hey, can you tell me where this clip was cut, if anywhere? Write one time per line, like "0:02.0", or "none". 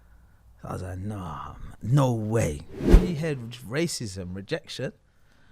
0:02.9